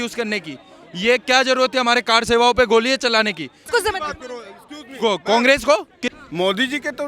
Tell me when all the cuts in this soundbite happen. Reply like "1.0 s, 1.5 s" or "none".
3.6 s, 6.2 s

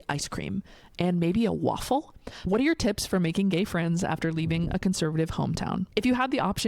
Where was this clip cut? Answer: 2.4 s, 5.9 s

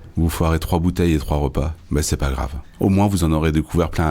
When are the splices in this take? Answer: 2.6 s

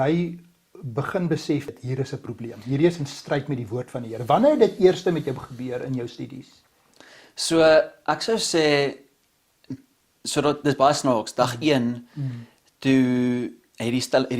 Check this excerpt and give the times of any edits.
1.7 s

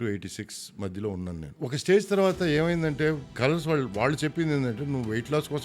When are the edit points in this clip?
1.5 s, 3.3 s

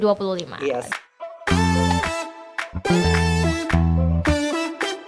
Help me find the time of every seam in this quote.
0.9 s

